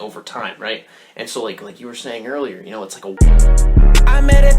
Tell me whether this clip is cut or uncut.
cut